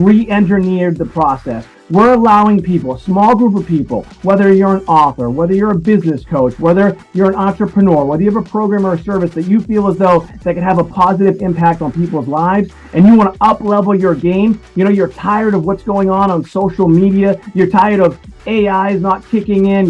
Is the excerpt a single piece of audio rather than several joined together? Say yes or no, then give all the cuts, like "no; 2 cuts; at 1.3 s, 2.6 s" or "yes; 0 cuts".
yes; 0 cuts